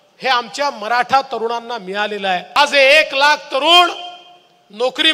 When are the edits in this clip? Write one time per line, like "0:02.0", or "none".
0:02.5